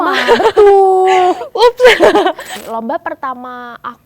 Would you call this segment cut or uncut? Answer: cut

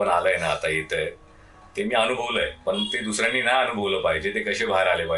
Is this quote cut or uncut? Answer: uncut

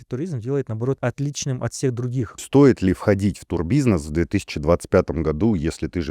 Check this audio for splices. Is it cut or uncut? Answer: cut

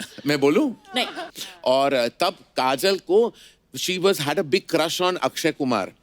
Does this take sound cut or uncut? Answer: cut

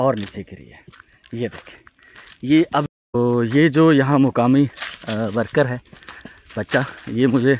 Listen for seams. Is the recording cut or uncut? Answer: cut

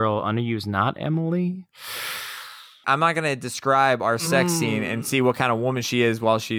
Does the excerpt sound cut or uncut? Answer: cut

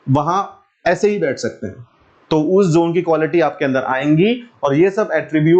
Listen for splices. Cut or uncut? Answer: uncut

